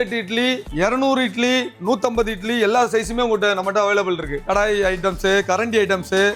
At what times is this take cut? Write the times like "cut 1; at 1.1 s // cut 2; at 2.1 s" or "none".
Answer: cut 1; at 4.4 s